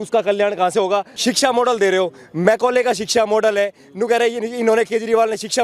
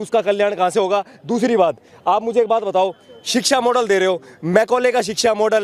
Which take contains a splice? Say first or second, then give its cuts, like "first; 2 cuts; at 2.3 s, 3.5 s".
first; 1 cut; at 1.1 s